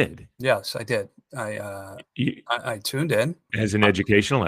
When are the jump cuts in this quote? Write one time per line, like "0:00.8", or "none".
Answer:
0:03.5